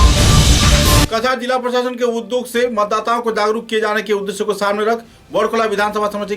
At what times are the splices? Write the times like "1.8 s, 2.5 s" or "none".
1.1 s